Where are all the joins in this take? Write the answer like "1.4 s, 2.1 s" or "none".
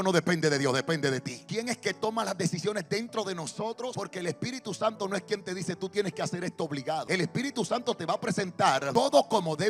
1.4 s, 3.9 s, 7.0 s, 8.9 s

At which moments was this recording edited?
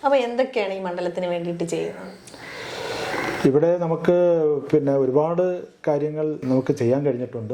none

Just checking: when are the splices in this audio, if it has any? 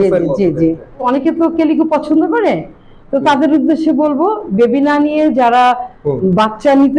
1.0 s

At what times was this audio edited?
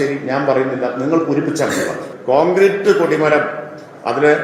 2.1 s

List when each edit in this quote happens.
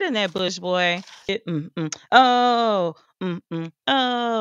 1.3 s

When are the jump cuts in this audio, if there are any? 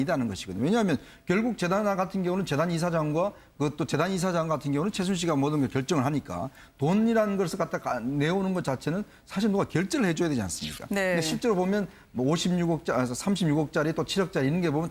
12.8 s

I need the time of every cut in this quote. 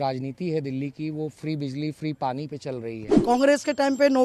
3.1 s

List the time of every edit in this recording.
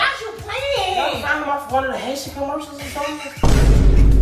none

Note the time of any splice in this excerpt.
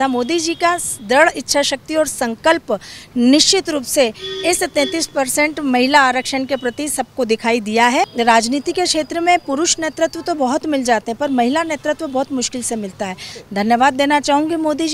8.1 s, 13.4 s

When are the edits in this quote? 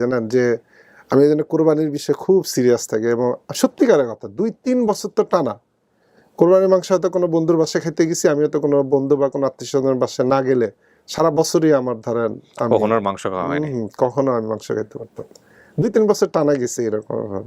none

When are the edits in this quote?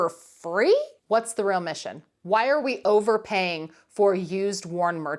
1.0 s, 2.1 s

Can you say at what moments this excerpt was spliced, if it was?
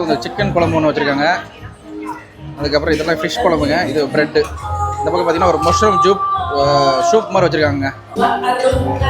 8.1 s

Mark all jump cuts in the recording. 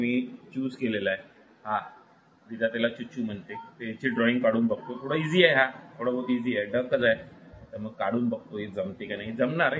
none

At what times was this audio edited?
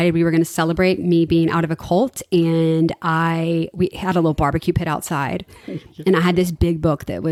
none

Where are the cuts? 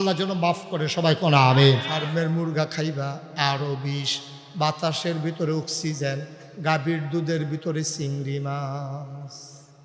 2.0 s

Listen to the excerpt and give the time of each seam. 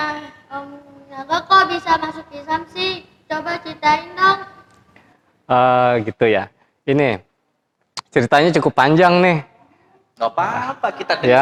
none

